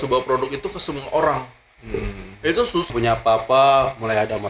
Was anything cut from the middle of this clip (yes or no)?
yes